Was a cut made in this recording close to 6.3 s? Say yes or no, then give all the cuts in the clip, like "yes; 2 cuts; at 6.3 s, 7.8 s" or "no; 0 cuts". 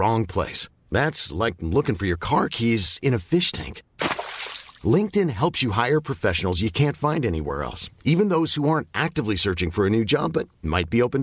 no; 0 cuts